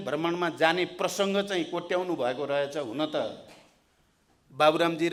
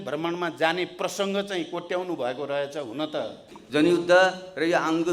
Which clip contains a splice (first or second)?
second